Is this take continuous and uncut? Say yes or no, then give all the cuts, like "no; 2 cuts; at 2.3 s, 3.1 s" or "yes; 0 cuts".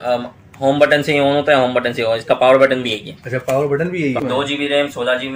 no; 1 cut; at 4.2 s